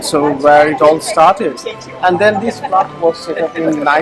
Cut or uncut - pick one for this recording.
uncut